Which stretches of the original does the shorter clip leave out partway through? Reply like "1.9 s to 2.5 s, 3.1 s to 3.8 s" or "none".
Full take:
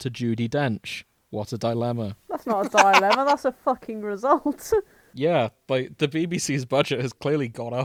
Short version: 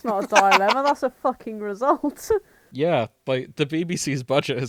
none